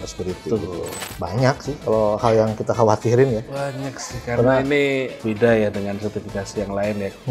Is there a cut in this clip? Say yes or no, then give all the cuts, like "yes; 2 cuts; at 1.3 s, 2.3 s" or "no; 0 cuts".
yes; 1 cut; at 1.0 s